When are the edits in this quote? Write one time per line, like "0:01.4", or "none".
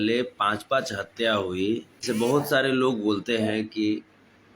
0:02.0